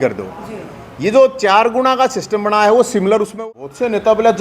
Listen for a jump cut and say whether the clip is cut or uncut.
cut